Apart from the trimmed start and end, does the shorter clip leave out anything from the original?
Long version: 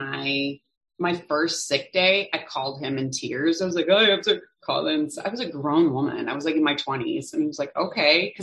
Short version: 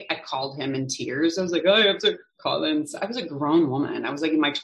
no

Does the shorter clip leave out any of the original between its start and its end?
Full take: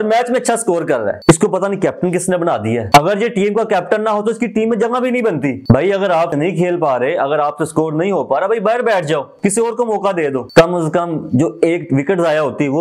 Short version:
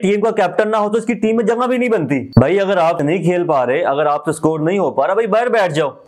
no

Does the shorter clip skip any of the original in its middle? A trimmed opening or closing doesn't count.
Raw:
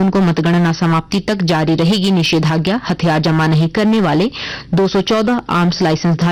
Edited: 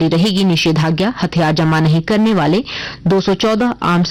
no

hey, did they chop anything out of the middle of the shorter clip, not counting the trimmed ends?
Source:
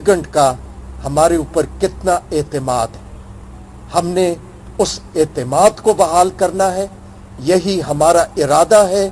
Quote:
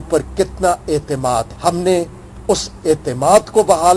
yes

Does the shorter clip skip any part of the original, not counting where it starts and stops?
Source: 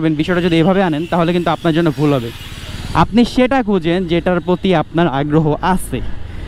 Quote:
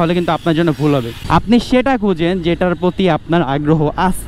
yes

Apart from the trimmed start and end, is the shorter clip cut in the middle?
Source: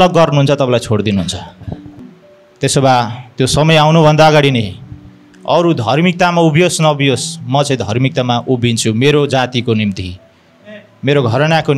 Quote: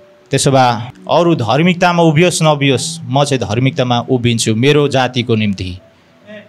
yes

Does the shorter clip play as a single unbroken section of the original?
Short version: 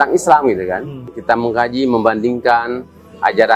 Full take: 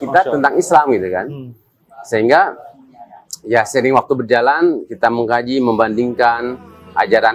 no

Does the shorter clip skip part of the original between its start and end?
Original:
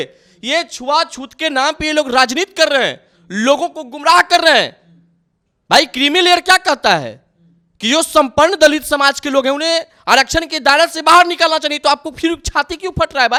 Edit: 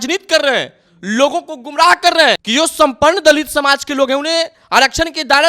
yes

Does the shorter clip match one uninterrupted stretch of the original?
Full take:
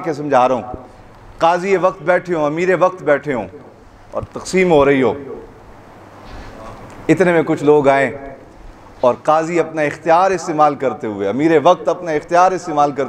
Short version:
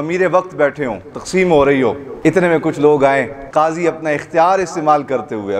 no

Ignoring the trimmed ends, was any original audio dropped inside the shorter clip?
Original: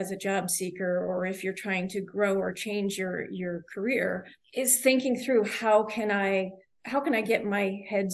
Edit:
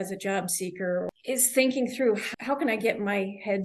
yes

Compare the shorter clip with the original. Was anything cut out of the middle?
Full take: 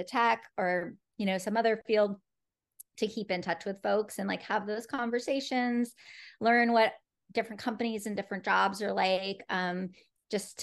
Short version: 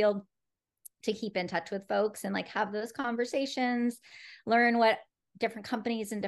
no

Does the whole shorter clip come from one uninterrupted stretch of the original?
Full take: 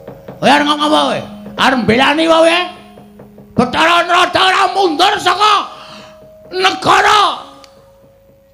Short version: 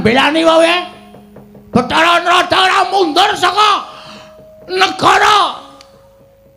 yes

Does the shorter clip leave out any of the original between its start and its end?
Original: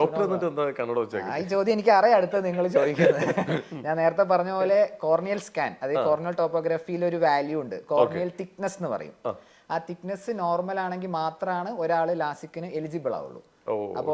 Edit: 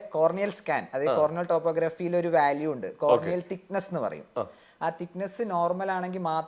no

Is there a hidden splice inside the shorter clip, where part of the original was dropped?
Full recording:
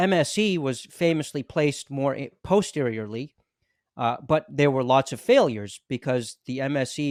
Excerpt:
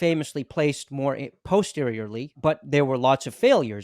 yes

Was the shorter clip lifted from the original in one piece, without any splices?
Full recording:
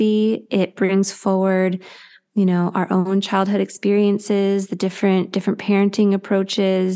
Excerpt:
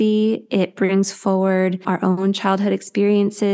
no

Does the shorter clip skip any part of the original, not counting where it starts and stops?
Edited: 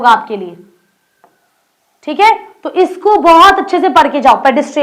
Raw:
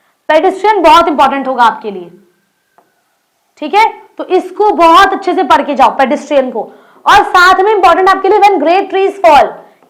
no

